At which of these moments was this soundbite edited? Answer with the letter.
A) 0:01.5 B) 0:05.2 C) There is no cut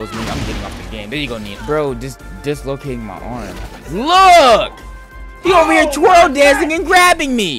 A